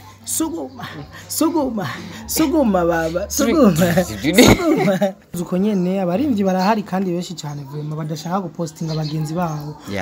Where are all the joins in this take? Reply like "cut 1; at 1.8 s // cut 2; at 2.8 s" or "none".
cut 1; at 5.3 s